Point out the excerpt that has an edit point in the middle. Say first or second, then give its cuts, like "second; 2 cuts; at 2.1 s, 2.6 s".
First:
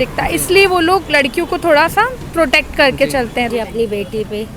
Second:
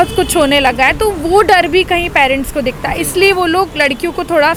first; 1 cut; at 3.5 s